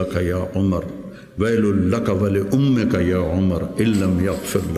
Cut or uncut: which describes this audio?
uncut